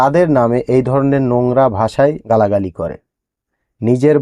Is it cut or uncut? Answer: cut